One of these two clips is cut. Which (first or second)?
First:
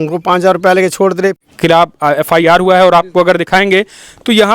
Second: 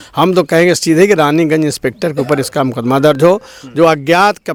first